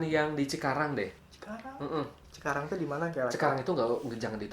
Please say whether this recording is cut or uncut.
cut